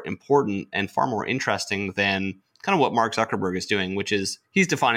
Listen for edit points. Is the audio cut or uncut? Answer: uncut